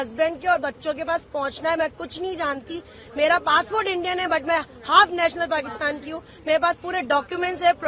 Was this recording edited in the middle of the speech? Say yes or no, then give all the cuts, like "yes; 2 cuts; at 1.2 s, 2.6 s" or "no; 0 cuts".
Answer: no; 0 cuts